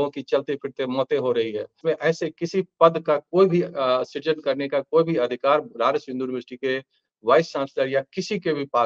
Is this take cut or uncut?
cut